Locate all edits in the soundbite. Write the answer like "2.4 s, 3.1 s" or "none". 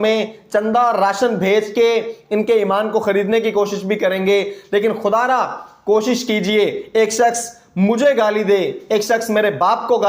none